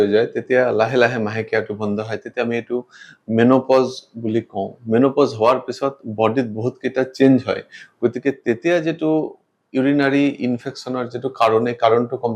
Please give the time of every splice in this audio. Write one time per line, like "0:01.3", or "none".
none